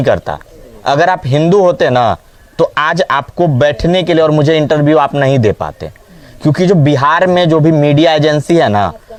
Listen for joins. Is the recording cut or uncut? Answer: uncut